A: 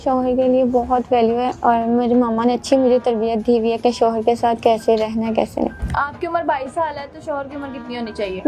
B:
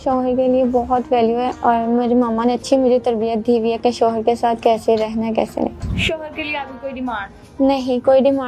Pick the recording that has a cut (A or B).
A